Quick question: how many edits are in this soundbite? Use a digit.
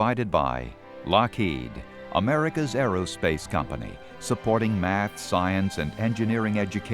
1